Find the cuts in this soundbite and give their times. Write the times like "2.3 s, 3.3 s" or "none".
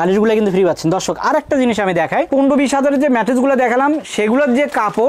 none